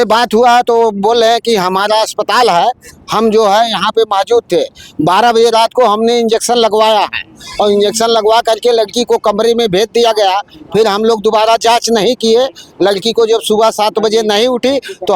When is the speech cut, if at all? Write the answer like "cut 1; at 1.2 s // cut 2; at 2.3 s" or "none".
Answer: none